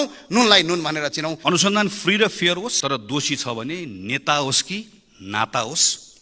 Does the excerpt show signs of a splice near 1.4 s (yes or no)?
yes